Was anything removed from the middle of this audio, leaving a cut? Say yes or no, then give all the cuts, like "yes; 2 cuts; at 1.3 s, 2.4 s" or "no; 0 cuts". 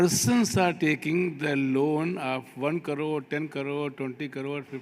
no; 0 cuts